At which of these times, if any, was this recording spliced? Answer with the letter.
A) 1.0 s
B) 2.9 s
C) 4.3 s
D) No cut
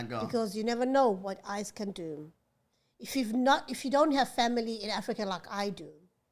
B